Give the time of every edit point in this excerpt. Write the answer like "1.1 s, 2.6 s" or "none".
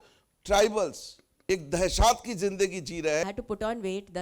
3.2 s